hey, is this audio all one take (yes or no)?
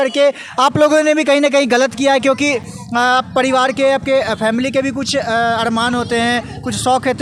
yes